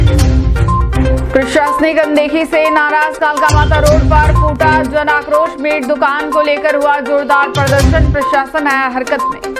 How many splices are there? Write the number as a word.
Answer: one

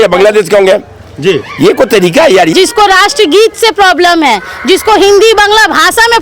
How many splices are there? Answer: one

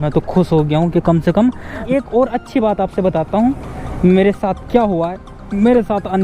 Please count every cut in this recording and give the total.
one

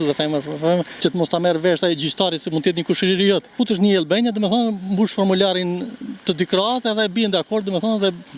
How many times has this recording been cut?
two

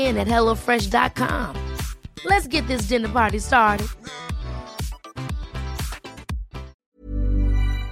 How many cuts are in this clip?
one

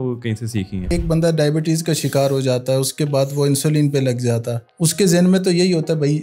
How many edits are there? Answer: two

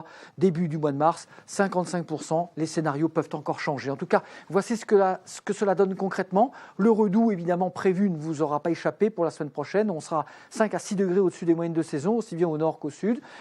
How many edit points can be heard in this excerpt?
one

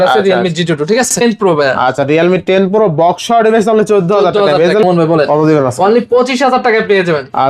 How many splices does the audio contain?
two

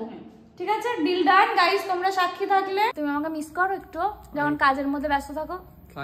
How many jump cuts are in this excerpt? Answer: one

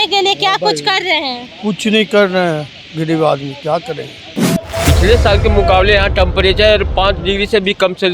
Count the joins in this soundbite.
one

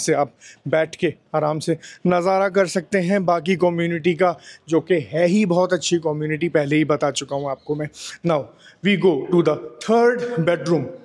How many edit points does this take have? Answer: zero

